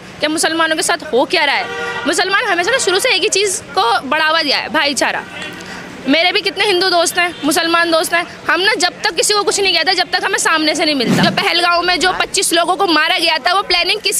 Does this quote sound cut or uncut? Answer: cut